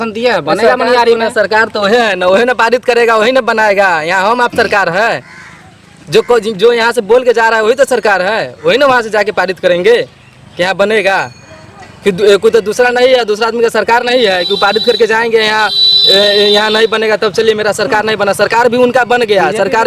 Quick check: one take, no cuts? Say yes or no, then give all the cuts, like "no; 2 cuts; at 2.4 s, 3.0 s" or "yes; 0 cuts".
yes; 0 cuts